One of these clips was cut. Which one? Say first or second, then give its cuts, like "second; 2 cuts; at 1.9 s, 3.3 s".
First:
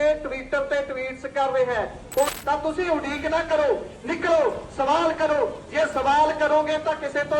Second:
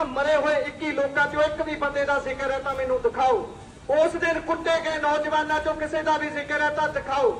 first; 1 cut; at 2.3 s